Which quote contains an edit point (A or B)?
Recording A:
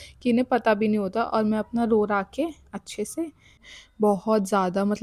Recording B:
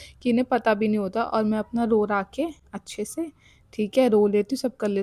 A